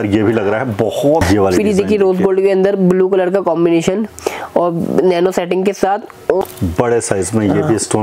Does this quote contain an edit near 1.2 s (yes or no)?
yes